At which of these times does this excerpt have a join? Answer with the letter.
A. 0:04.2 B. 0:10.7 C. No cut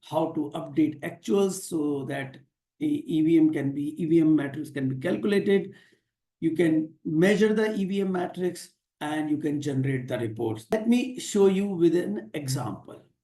B